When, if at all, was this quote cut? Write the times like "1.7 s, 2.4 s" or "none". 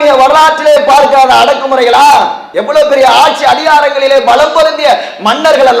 2.4 s